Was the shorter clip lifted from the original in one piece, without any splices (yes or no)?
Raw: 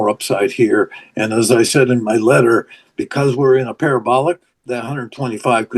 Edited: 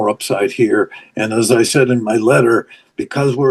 yes